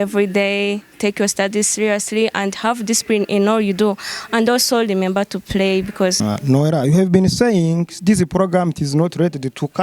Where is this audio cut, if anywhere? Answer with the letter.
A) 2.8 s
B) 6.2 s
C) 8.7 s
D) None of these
B